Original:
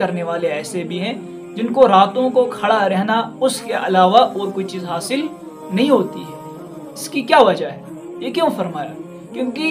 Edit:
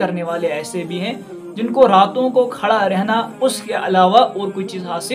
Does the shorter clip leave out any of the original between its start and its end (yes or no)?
no